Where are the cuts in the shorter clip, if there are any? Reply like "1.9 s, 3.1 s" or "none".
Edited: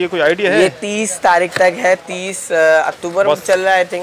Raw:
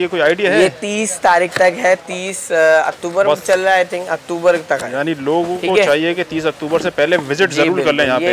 none